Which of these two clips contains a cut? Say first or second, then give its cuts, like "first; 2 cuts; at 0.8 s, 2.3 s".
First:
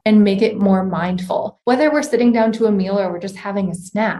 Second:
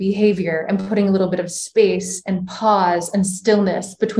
first; 1 cut; at 1.5 s